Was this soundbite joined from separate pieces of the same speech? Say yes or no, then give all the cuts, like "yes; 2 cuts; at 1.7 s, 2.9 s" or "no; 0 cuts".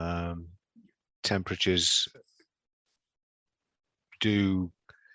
no; 0 cuts